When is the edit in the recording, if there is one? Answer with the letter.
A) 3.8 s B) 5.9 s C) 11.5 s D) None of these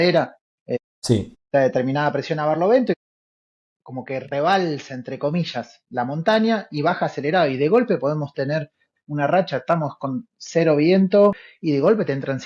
C